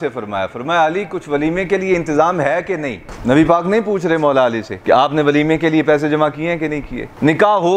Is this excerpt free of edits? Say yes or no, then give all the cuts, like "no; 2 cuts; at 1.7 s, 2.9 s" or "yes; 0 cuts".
no; 2 cuts; at 3.0 s, 4.7 s